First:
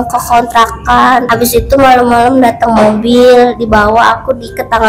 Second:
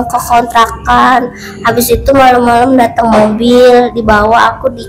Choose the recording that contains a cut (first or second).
first